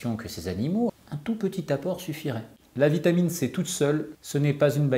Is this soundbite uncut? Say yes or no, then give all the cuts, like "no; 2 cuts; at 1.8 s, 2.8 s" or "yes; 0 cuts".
no; 3 cuts; at 0.9 s, 2.5 s, 4.1 s